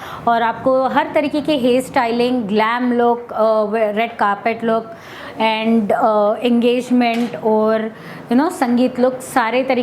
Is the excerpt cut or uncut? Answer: uncut